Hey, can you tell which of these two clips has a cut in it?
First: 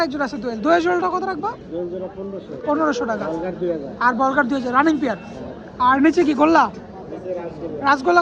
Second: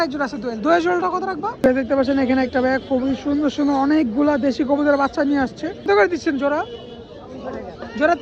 second; 2 cuts; at 1.5 s, 5.9 s

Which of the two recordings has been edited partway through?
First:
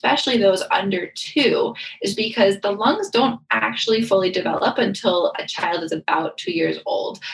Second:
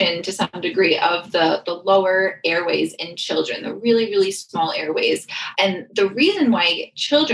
second; 1 cut; at 5.4 s

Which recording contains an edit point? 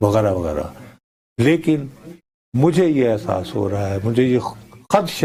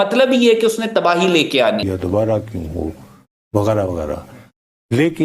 second; 1 cut; at 1.8 s

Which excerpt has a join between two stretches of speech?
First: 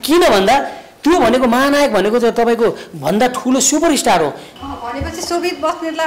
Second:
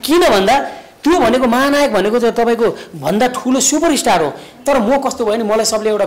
first; 1 cut; at 4.5 s

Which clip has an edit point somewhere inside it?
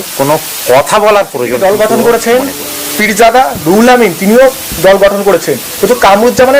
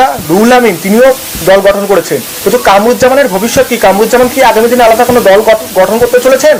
first; 1 cut; at 1.5 s

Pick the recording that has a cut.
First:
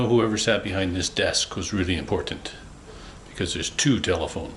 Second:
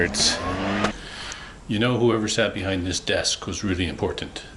second; 1 cut; at 0.9 s

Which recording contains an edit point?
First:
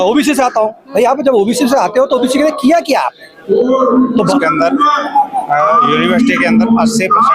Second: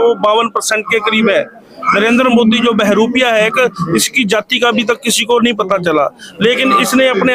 first; 1 cut; at 4.3 s

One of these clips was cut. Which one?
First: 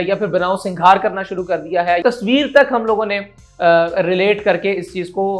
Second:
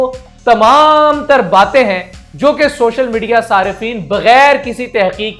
first; 1 cut; at 2.0 s

